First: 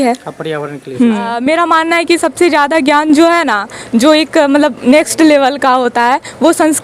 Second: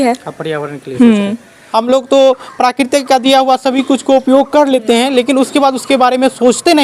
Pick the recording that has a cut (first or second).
first